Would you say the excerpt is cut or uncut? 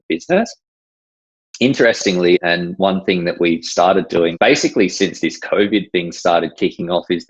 cut